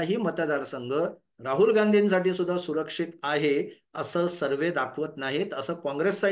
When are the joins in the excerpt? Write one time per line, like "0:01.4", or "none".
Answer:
none